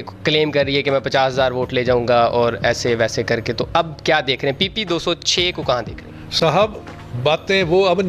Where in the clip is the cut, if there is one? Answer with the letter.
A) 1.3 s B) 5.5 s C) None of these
C